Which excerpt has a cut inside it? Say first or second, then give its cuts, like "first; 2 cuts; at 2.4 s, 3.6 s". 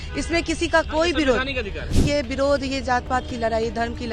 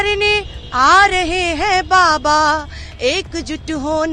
first; 1 cut; at 1.9 s